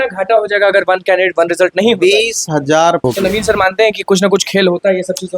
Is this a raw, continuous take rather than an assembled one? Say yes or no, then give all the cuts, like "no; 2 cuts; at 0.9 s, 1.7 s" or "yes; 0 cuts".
no; 1 cut; at 3.0 s